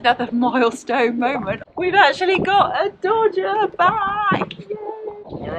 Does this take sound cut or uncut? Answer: uncut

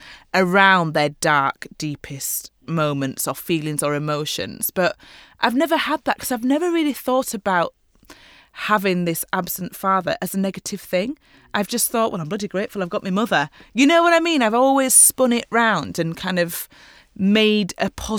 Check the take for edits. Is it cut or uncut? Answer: uncut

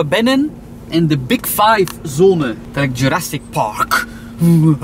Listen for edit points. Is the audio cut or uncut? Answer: cut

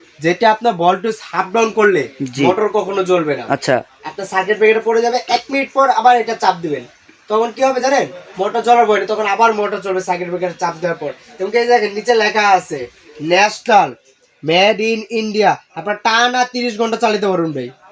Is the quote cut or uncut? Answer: uncut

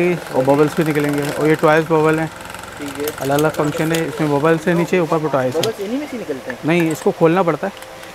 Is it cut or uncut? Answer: uncut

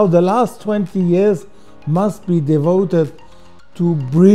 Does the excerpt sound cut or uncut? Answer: uncut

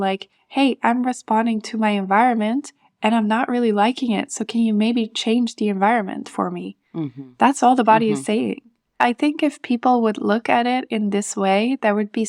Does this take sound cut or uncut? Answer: cut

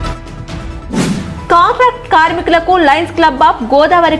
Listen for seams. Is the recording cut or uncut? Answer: cut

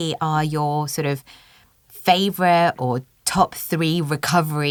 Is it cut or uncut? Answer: uncut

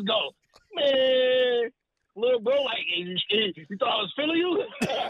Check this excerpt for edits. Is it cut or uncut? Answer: uncut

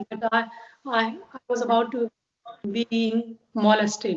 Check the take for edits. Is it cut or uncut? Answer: uncut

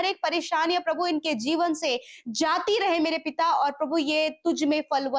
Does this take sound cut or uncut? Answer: uncut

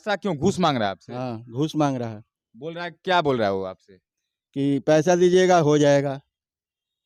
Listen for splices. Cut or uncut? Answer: uncut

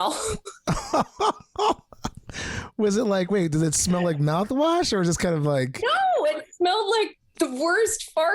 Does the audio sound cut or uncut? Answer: uncut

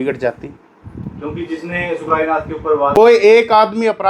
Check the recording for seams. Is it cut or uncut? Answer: cut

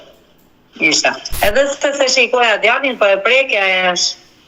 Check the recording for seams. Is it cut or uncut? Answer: cut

